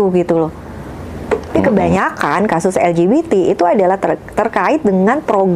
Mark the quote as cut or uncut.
cut